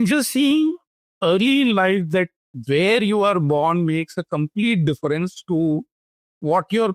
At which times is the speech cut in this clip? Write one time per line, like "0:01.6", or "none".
none